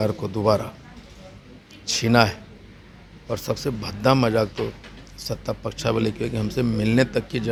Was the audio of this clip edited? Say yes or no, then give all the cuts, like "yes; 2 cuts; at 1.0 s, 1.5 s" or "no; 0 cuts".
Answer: no; 0 cuts